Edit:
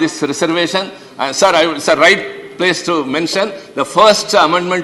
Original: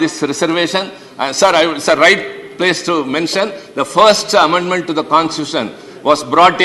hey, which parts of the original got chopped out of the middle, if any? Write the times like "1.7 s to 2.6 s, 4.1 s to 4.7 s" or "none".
none